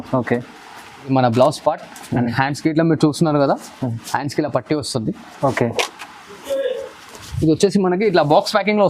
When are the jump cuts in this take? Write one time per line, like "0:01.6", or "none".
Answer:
0:01.1